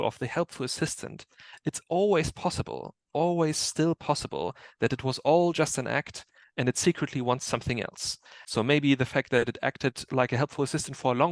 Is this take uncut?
no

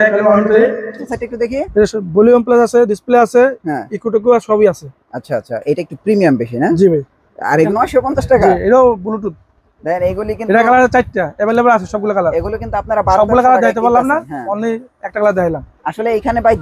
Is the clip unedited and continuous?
no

